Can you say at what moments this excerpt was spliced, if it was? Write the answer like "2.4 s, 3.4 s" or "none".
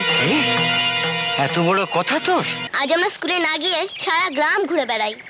2.6 s